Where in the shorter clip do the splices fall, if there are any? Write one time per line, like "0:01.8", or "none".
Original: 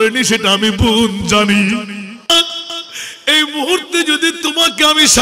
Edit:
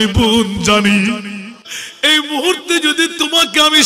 0:01.5